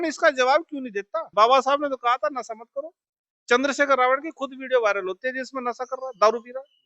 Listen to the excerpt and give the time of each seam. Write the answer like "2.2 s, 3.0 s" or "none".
1.2 s